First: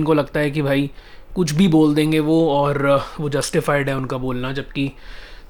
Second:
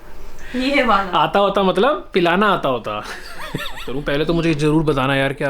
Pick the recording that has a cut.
second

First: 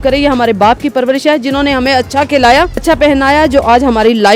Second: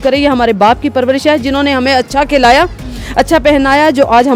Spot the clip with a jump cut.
first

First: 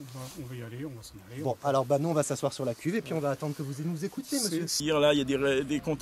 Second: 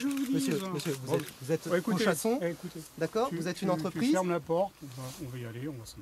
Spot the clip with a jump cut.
first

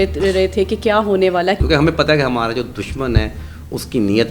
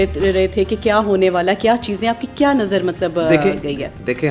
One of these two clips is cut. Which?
first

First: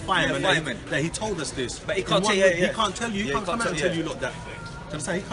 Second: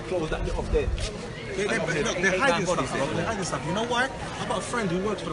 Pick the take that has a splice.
second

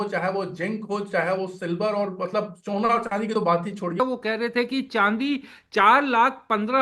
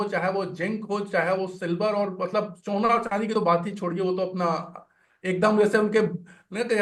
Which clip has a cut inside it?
first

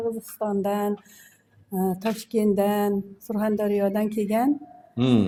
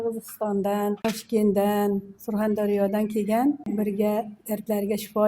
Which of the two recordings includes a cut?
second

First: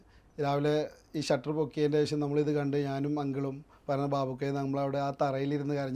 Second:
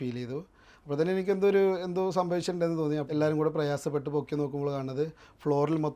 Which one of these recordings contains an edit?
second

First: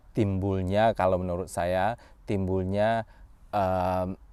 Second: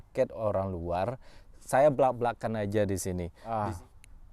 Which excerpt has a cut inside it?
second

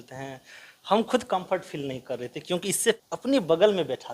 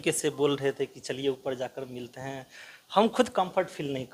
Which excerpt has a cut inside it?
first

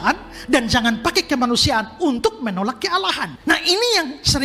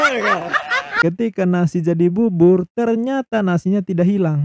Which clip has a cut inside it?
second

